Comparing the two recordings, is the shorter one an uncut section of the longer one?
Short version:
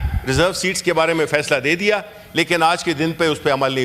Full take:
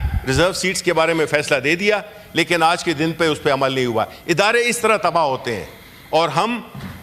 yes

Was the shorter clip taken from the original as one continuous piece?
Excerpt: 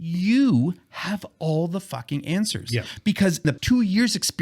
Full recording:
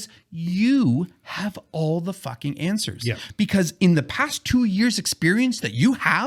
no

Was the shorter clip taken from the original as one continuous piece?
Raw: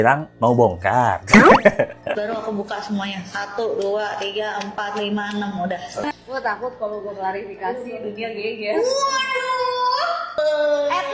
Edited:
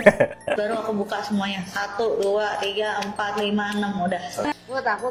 yes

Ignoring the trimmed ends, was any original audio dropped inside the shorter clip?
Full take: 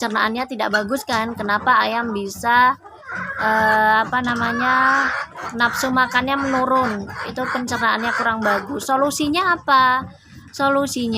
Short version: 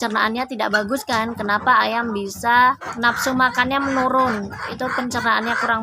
yes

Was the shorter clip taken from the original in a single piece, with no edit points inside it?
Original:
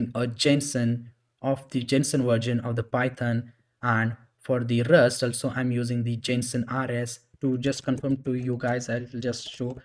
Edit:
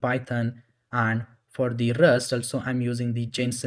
yes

